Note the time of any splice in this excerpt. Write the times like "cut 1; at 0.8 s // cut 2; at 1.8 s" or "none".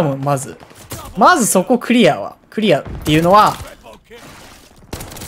cut 1; at 4.2 s